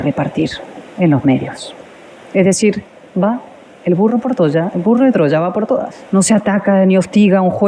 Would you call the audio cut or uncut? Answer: cut